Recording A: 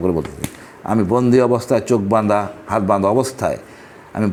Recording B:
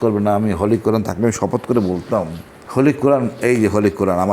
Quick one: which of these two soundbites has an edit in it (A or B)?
B